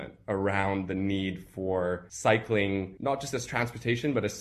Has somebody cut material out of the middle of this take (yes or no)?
yes